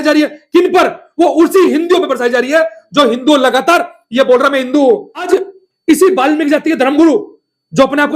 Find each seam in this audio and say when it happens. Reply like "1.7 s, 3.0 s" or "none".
5.3 s